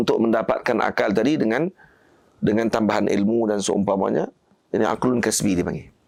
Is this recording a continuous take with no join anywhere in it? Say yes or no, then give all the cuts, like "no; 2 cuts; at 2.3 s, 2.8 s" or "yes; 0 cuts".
yes; 0 cuts